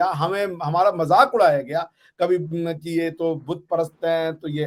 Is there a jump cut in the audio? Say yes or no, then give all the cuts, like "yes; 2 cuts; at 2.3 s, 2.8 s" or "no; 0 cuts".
no; 0 cuts